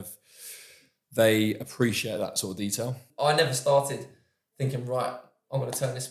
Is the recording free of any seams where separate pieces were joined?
no; 1 cut; at 3.0 s

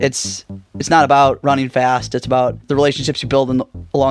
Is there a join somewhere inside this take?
yes; 1 cut; at 2.6 s

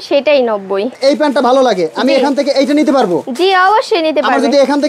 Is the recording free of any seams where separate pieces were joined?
no; 1 cut; at 1.0 s

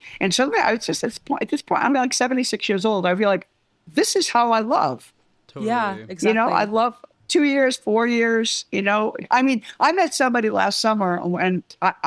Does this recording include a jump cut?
no; 0 cuts

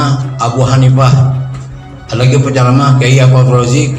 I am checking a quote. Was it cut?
no; 0 cuts

